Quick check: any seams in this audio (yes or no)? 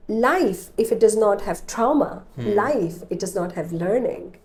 no